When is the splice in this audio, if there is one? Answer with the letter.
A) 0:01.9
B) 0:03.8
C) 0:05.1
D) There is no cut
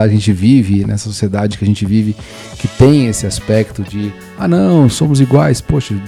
D